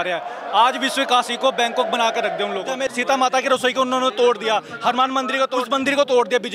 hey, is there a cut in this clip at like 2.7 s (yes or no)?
yes